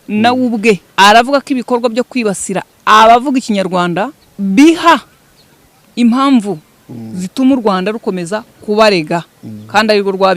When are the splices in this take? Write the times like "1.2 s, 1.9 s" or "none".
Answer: 0.9 s, 4.2 s